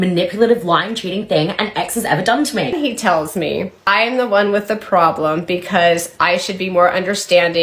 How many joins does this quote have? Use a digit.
2